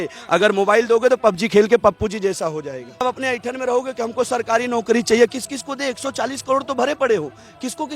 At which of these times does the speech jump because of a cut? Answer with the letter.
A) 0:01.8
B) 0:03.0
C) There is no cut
B